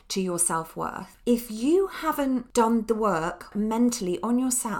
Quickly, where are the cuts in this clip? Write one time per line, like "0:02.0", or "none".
0:01.1
0:02.5
0:03.5